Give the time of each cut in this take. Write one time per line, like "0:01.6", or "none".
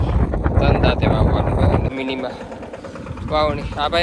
0:01.9